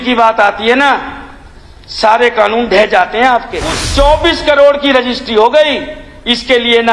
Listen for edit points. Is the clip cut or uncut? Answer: cut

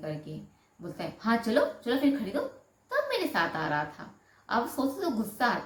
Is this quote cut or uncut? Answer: uncut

